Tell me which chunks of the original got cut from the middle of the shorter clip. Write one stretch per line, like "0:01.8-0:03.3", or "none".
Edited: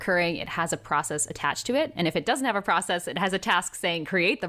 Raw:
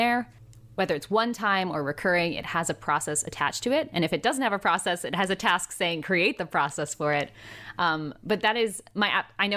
none

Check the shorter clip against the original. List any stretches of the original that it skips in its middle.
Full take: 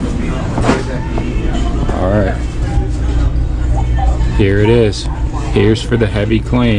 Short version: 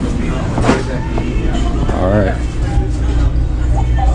none

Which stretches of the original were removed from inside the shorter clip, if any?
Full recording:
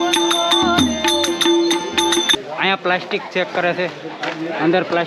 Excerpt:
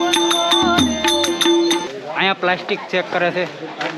0:01.9-0:02.3

